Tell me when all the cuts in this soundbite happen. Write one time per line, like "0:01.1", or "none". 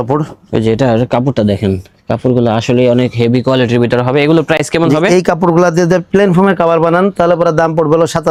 none